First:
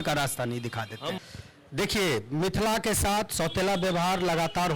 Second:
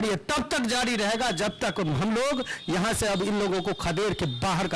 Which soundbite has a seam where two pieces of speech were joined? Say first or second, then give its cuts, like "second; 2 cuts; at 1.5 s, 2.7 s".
first; 1 cut; at 1.2 s